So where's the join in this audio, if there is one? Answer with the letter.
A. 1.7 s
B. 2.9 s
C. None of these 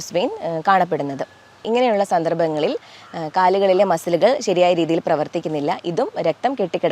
A